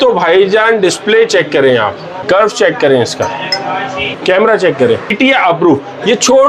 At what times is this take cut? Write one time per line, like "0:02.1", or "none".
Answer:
0:02.2
0:04.0
0:05.1